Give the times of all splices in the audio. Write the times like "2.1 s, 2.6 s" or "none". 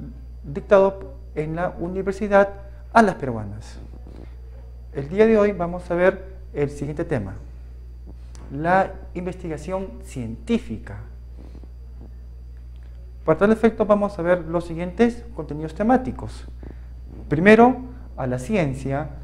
14.0 s